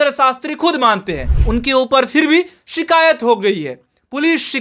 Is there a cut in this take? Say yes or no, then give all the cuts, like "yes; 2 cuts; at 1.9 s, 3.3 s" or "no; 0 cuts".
yes; 1 cut; at 1.3 s